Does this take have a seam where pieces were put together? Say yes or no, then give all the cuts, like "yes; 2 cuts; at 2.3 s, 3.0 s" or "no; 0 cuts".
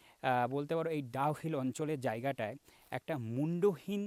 no; 0 cuts